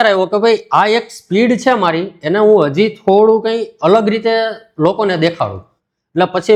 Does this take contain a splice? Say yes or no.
no